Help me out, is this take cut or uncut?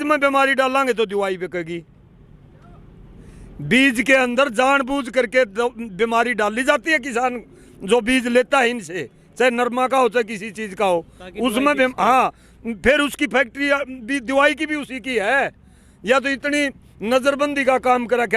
uncut